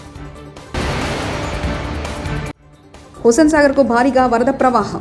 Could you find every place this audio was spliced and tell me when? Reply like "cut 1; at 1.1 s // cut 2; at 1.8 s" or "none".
none